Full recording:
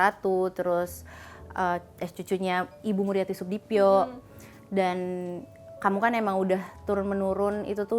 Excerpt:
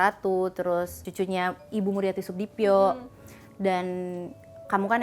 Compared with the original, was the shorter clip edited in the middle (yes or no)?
yes